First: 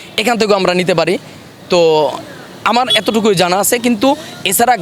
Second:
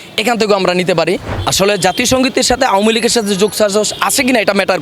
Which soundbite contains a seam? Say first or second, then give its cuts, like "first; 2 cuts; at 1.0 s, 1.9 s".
second; 1 cut; at 1.4 s